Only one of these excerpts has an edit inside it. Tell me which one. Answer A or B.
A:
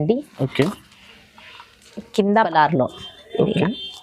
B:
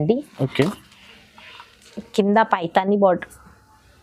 A